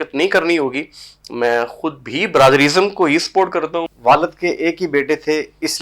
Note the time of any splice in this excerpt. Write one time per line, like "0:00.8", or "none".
0:03.9